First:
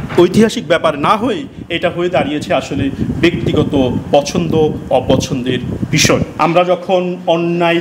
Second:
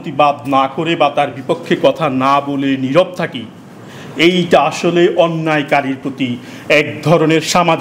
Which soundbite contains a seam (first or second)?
first